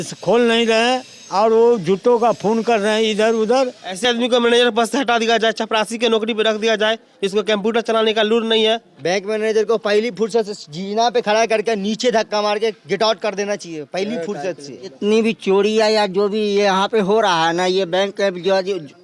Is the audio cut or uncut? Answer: cut